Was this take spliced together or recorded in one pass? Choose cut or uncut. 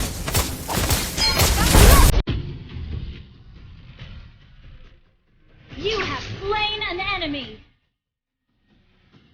cut